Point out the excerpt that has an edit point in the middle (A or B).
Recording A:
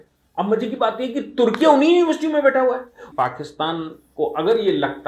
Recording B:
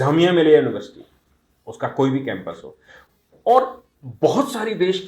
A